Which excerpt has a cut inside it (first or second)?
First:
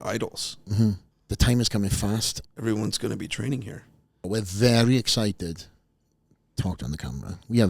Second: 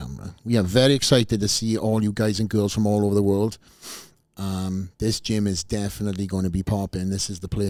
first